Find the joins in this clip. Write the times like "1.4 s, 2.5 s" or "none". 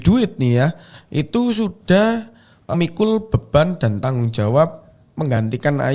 none